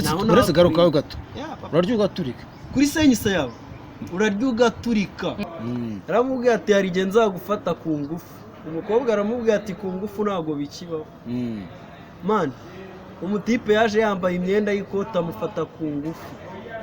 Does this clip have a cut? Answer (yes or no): yes